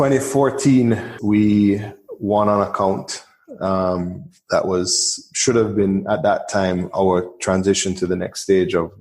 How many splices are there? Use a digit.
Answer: 1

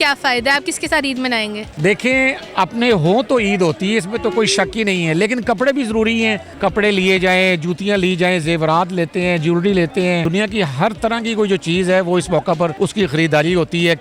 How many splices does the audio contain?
4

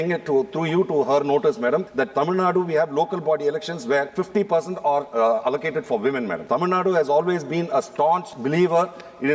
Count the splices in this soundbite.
5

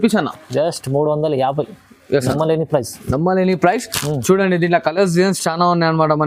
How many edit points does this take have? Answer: 0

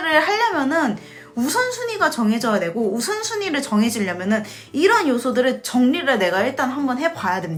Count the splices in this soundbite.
0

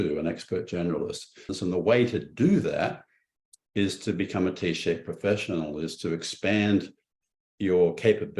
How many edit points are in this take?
1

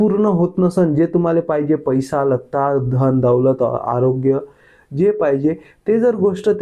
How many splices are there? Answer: 0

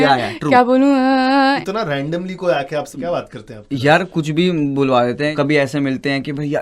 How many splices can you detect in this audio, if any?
3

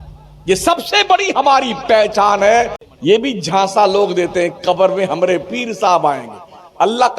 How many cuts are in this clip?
1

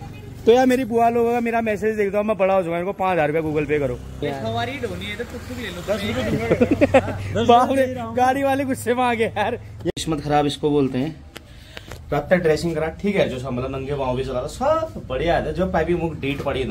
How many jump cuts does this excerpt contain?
2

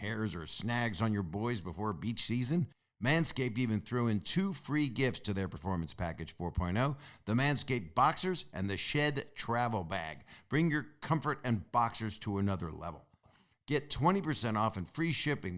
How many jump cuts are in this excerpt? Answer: 1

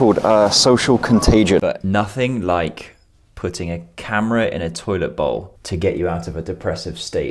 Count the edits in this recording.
2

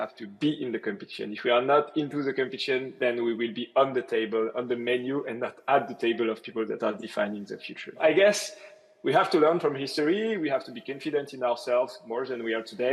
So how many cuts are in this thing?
1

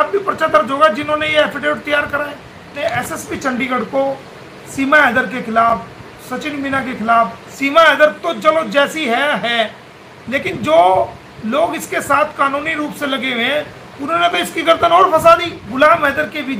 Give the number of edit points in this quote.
3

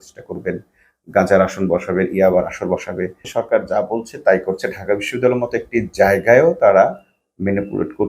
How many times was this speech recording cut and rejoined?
1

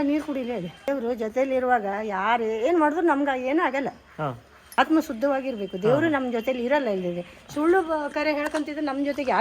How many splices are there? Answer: 2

